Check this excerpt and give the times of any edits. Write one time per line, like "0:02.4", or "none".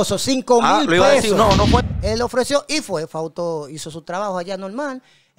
0:01.8